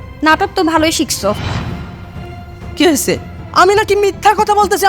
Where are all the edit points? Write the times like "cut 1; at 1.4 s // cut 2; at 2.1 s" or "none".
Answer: cut 1; at 3.4 s